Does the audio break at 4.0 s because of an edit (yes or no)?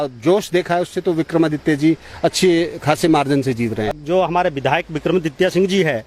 yes